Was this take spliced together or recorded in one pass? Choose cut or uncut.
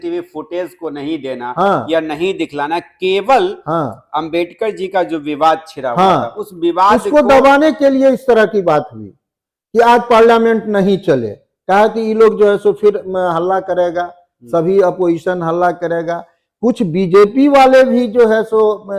uncut